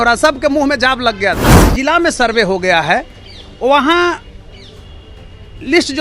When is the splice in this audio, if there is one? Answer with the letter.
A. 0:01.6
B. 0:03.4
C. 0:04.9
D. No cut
A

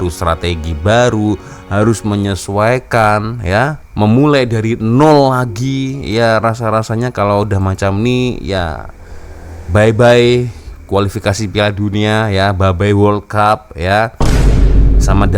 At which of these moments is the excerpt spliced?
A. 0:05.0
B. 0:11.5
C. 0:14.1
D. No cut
D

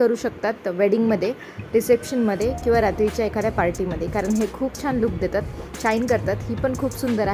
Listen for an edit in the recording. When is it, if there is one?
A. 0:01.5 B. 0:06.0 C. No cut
C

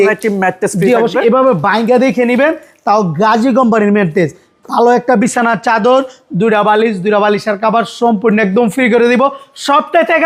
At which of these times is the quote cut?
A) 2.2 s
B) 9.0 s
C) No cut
C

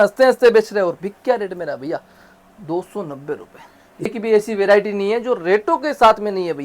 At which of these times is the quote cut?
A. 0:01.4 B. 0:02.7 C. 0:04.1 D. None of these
C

